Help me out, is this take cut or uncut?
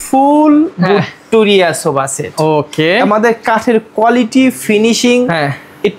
uncut